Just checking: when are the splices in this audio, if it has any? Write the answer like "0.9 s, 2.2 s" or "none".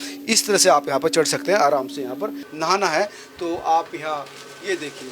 2.4 s